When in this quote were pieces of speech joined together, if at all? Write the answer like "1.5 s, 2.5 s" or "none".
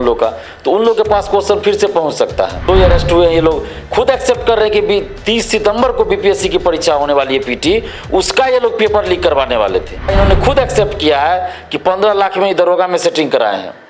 2.6 s, 10.1 s